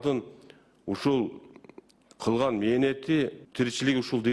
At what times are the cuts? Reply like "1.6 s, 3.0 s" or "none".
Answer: 3.4 s